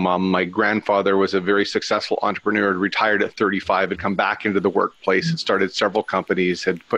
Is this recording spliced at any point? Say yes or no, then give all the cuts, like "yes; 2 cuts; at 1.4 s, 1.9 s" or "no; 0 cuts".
no; 0 cuts